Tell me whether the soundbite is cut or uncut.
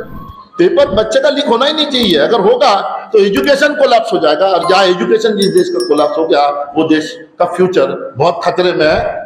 uncut